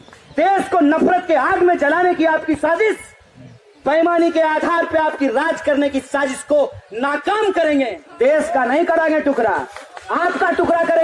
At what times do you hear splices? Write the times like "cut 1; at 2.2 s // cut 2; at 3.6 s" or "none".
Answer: cut 1; at 8.0 s

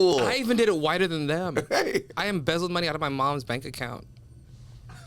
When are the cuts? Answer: cut 1; at 2.1 s

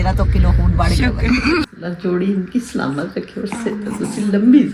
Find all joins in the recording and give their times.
cut 1; at 1.6 s

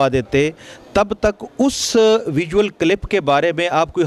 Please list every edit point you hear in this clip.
none

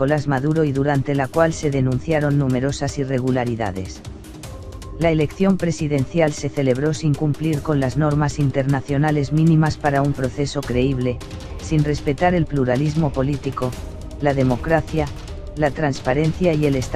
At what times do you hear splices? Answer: cut 1; at 8.3 s

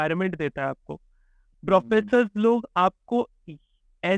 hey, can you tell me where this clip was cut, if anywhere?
none

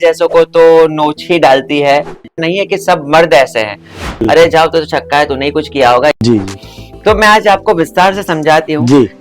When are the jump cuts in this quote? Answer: cut 1; at 2.3 s // cut 2; at 4.2 s // cut 3; at 6.2 s

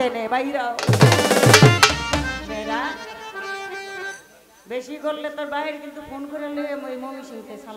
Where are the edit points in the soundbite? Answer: none

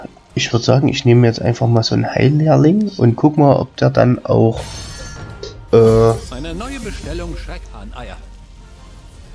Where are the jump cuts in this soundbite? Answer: none

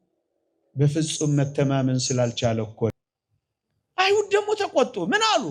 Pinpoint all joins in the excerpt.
cut 1; at 2.9 s

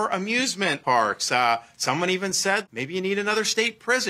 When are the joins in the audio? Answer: cut 1; at 0.8 s // cut 2; at 2.6 s

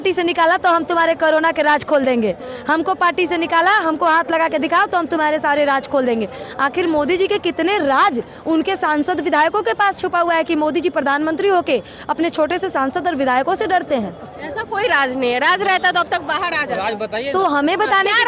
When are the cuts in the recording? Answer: none

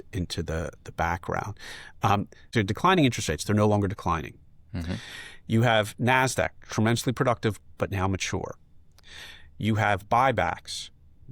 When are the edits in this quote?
cut 1; at 2.4 s

